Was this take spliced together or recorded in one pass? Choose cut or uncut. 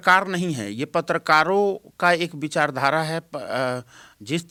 uncut